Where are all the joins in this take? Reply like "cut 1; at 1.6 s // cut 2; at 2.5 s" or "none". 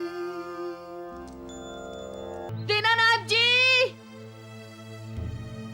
cut 1; at 2.5 s